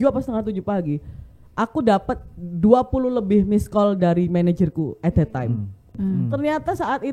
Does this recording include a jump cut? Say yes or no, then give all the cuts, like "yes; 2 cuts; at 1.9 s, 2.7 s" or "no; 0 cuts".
yes; 1 cut; at 5.9 s